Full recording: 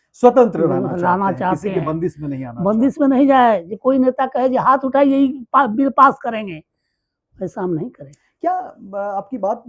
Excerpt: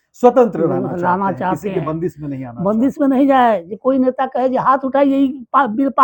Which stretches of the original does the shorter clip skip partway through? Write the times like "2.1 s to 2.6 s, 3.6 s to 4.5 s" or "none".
none